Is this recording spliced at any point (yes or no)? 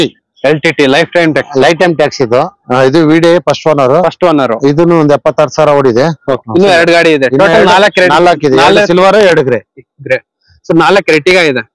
yes